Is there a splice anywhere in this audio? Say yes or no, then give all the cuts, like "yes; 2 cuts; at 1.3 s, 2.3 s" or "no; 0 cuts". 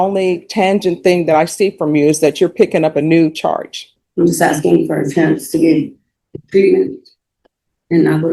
yes; 1 cut; at 4.0 s